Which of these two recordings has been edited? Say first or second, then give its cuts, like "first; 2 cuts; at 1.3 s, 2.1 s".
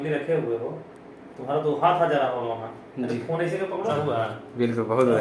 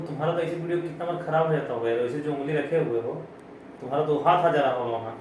first; 1 cut; at 3.9 s